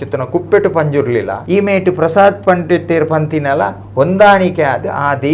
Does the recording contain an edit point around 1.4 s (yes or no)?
yes